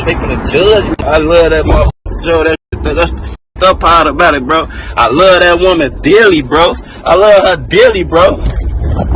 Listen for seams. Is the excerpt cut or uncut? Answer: cut